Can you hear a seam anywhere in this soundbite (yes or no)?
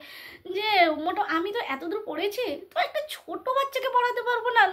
no